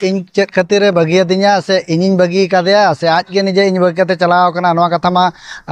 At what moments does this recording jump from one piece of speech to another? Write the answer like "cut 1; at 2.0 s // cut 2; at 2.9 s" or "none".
none